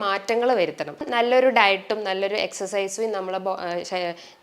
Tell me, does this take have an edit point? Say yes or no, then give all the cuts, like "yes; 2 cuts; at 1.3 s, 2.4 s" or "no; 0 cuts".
yes; 1 cut; at 1.1 s